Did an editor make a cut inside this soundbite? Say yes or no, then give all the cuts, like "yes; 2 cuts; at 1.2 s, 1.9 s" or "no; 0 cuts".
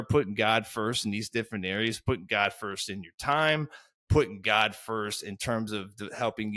no; 0 cuts